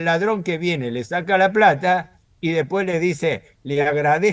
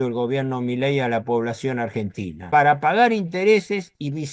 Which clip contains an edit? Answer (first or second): second